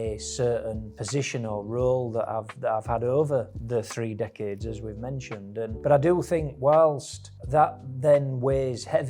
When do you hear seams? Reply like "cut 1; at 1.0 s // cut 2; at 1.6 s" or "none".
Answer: none